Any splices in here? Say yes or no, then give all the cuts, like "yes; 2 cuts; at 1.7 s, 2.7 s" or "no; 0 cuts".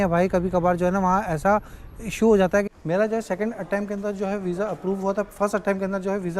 yes; 1 cut; at 2.6 s